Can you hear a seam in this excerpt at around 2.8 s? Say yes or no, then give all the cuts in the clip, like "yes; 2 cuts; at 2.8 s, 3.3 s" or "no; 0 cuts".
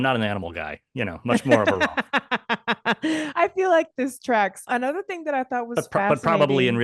no; 1 cut; at 4.6 s